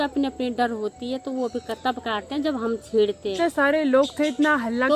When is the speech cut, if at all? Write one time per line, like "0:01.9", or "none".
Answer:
0:03.3